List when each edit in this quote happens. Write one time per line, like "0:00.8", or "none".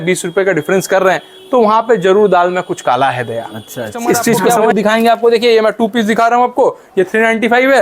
0:04.5